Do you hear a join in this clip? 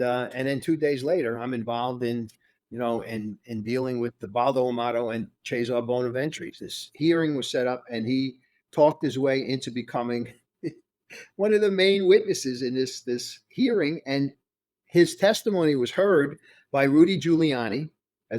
yes; 1 cut; at 6.5 s

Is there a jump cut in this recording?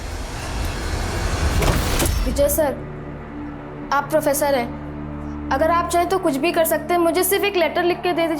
yes; 1 cut; at 2.2 s

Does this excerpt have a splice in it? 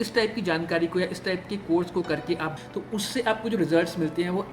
yes; 1 cut; at 2.6 s

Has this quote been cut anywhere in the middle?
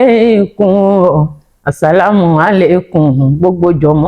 no; 0 cuts

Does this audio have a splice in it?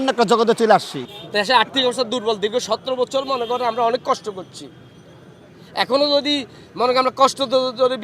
no; 0 cuts

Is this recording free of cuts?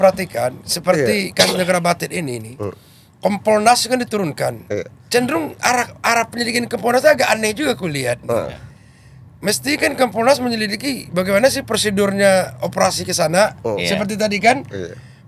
yes; 0 cuts

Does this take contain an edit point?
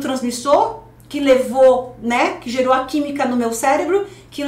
no; 0 cuts

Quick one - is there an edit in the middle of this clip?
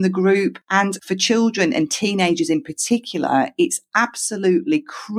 yes; 1 cut; at 1.0 s

